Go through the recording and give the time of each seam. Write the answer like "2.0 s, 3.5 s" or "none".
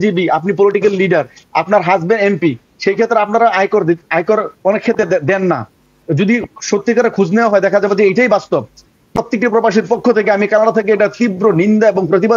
9.1 s